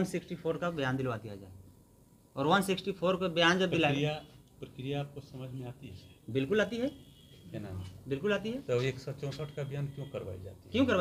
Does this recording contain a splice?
no; 0 cuts

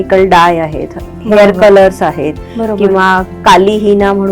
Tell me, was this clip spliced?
no; 0 cuts

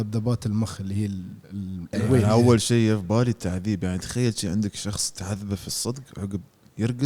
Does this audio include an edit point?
yes; 1 cut; at 2.2 s

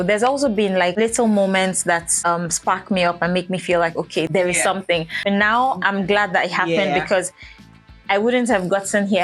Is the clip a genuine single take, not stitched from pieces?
no; 4 cuts; at 0.9 s, 2.1 s, 4.3 s, 5.2 s

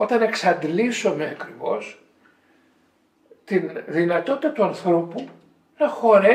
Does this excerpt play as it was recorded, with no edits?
yes; 0 cuts

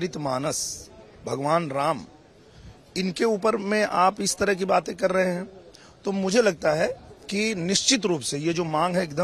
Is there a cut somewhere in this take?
no; 0 cuts

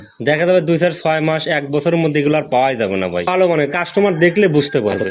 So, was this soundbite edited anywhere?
yes; 1 cut; at 3.3 s

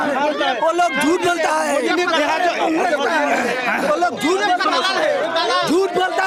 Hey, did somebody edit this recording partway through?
no; 0 cuts

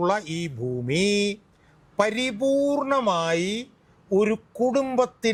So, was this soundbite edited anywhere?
no; 0 cuts

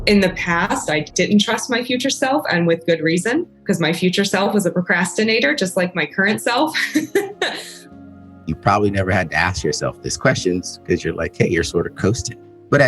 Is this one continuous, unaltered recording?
no; 3 cuts; at 1.1 s, 3.5 s, 7.9 s

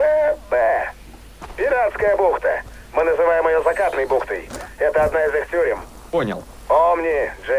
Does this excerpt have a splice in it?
no; 0 cuts

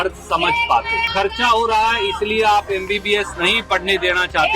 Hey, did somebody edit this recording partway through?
yes; 1 cut; at 1.1 s

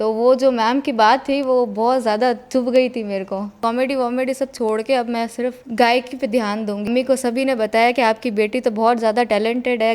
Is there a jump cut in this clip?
yes; 2 cuts; at 3.6 s, 6.9 s

